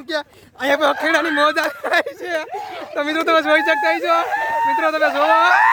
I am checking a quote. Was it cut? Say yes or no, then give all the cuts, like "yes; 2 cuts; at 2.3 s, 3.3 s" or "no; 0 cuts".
no; 0 cuts